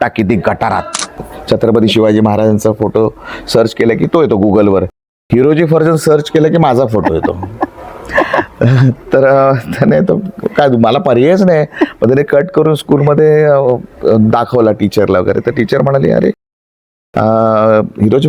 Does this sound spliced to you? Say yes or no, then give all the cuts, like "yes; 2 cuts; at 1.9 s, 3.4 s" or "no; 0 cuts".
yes; 1 cut; at 1.2 s